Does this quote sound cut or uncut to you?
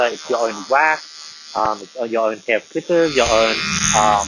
uncut